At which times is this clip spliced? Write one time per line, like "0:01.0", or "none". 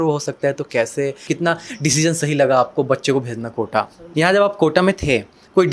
0:01.2
0:04.0